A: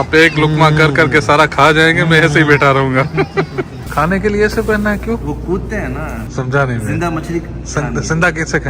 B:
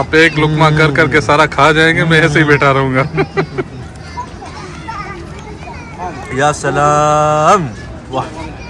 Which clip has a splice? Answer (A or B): A